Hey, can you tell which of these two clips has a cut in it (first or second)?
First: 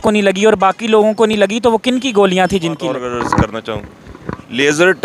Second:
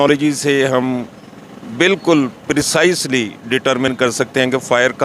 first